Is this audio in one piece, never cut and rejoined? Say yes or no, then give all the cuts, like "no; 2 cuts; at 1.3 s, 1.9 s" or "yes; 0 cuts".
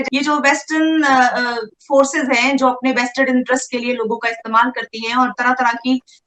yes; 0 cuts